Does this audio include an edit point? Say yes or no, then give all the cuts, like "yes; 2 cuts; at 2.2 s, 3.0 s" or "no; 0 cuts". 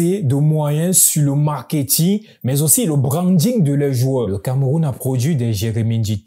yes; 1 cut; at 4.3 s